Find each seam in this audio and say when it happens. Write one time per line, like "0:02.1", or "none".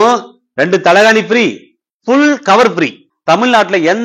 0:03.1